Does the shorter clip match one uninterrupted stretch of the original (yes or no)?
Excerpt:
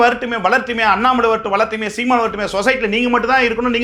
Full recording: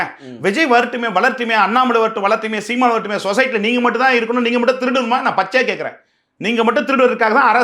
yes